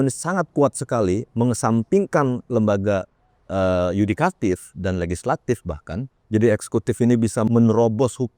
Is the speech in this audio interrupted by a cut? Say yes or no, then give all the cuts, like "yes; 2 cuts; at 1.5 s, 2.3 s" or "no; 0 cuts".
yes; 2 cuts; at 6.2 s, 7.5 s